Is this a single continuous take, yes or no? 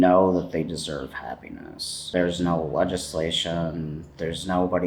no